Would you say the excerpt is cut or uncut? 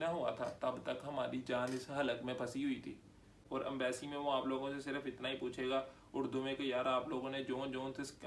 cut